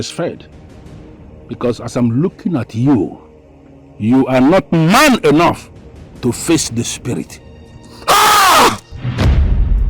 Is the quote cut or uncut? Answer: cut